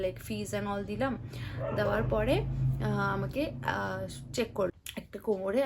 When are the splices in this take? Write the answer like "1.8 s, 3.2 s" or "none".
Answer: 4.7 s